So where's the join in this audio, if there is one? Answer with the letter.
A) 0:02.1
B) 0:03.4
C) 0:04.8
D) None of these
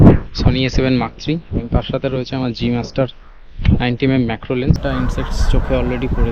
C